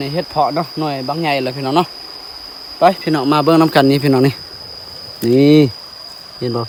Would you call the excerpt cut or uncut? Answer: uncut